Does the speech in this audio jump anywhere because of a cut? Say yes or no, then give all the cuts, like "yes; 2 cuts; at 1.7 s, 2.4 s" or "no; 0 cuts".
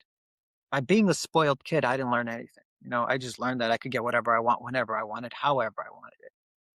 no; 0 cuts